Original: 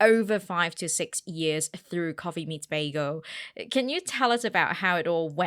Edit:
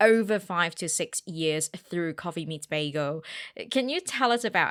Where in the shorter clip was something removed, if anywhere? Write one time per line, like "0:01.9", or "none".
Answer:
none